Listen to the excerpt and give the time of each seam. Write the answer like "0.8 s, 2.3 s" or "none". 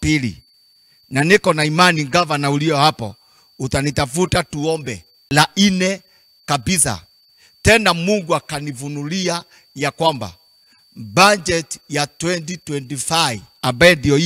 5.1 s